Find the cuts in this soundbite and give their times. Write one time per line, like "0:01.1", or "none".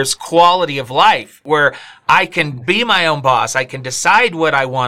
0:01.4